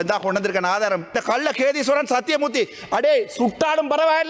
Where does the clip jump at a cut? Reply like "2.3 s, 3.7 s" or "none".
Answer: 1.1 s